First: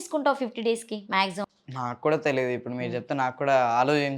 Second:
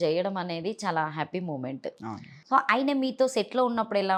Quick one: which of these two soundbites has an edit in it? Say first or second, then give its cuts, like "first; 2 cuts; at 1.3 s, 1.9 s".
first; 1 cut; at 1.5 s